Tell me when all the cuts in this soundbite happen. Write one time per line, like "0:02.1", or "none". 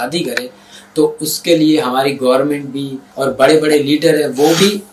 0:03.0